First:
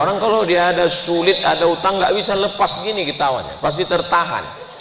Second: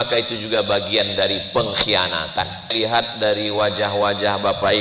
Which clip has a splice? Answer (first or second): second